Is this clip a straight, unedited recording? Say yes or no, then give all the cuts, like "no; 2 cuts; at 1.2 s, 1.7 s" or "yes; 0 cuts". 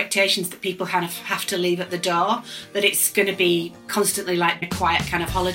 no; 1 cut; at 4.6 s